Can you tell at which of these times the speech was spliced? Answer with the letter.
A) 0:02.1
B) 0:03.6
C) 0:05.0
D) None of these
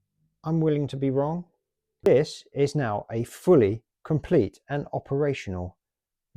A